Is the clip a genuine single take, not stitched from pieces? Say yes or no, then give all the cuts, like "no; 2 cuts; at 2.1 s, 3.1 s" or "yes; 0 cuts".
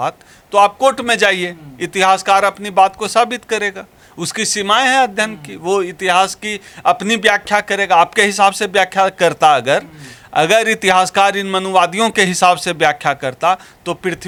yes; 0 cuts